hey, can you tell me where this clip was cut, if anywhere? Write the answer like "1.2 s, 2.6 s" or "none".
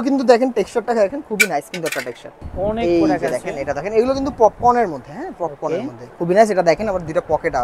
2.5 s, 6.1 s